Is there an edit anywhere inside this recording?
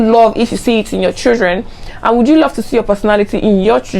no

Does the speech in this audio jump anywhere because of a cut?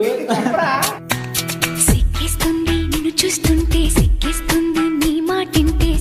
yes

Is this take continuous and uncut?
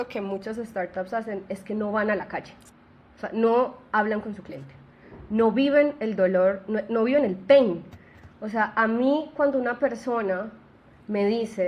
yes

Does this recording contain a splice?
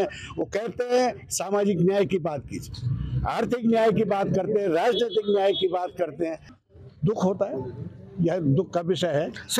yes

